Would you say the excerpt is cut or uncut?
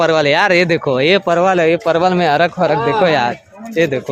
uncut